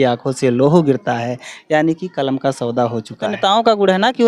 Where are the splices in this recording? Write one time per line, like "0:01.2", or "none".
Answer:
0:03.4